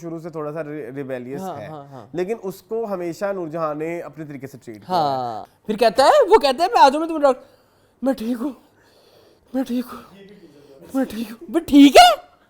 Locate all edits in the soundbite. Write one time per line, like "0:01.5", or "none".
0:05.4

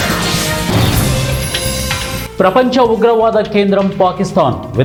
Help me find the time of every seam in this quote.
none

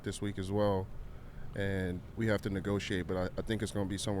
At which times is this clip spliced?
0:02.1

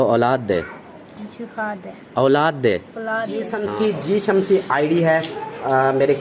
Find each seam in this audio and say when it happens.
0:03.6

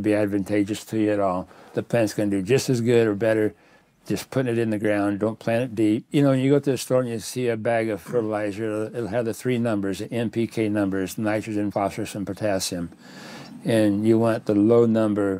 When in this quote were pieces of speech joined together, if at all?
0:06.1
0:11.7

